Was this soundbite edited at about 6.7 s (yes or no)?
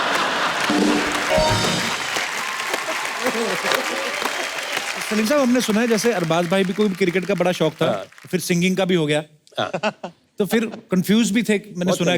no